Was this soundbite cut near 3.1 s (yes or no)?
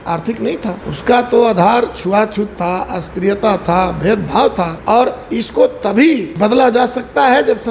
no